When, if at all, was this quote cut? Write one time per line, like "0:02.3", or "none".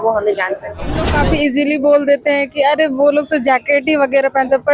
0:01.2